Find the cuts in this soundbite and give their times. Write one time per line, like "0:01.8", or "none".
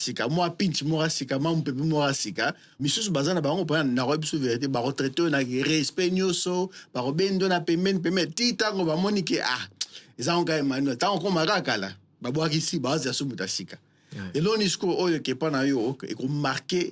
0:02.7